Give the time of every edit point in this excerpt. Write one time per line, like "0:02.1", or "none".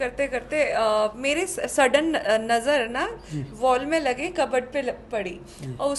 none